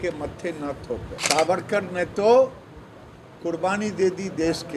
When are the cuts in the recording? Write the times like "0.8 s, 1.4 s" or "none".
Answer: 1.1 s